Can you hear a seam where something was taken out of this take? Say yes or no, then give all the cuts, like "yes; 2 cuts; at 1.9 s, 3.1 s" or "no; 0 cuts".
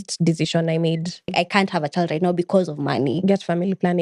yes; 1 cut; at 1.3 s